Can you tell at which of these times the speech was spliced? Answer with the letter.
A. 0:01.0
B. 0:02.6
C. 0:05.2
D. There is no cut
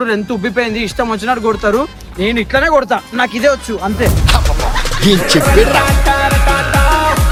D